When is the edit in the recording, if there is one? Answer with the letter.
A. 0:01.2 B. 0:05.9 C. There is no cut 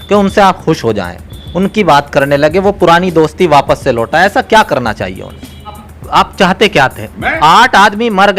B